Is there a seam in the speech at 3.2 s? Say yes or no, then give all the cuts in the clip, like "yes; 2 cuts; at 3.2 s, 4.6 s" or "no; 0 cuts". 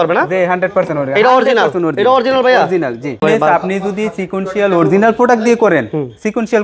yes; 1 cut; at 3.2 s